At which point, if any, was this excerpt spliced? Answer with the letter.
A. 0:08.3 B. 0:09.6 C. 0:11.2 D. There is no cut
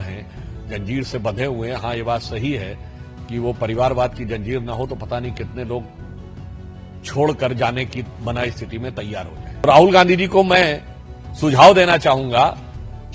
B